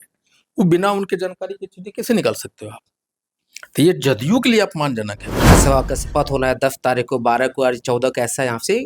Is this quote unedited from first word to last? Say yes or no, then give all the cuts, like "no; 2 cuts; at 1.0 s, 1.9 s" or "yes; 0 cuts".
no; 1 cut; at 5.5 s